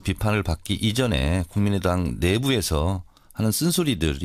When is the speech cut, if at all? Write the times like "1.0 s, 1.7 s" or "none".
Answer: 3.0 s